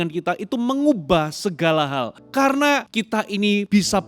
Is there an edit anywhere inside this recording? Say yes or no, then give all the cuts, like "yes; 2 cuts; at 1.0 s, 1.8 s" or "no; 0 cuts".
yes; 2 cuts; at 2.2 s, 3.1 s